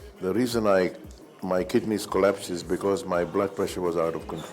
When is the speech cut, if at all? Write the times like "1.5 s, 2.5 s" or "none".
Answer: none